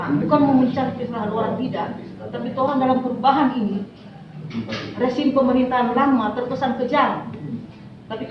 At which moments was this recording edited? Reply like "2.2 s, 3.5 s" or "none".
none